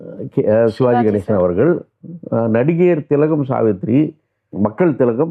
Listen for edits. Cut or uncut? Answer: uncut